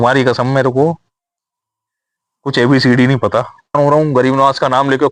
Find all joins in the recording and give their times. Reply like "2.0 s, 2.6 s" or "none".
3.7 s